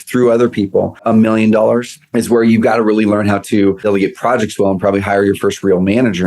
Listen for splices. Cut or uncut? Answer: cut